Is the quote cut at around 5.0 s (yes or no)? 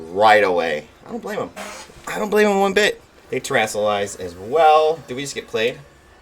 no